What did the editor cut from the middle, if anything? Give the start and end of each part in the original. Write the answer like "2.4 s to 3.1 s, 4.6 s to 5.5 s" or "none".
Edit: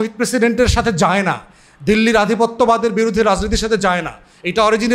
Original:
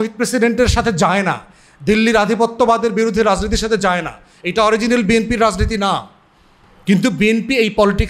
none